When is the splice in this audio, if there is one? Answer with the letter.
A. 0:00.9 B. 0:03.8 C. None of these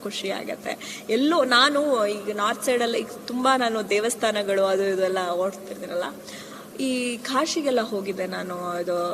C